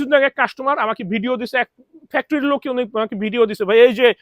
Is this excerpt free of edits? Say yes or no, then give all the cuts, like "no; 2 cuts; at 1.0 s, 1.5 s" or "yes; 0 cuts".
yes; 0 cuts